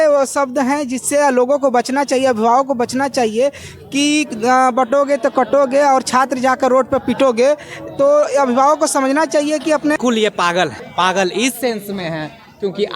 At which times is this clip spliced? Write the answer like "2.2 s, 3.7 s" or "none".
10.0 s

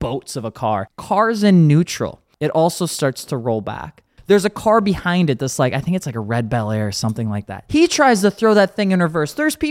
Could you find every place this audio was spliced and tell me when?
0.9 s, 2.2 s, 4.1 s, 7.6 s

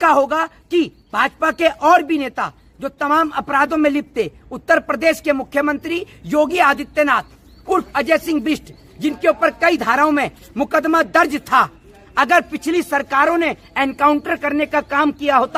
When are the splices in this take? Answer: none

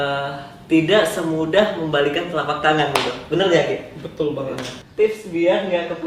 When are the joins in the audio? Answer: 4.8 s

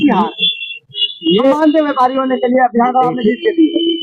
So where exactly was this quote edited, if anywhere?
none

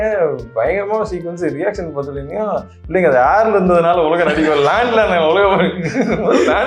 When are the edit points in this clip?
none

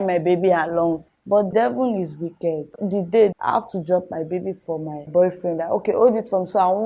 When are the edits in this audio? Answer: 1.0 s

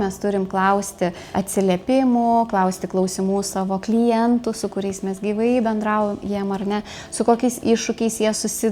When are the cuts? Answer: 1.3 s

